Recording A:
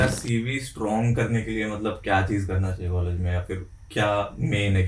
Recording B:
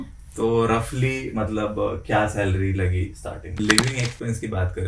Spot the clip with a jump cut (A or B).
B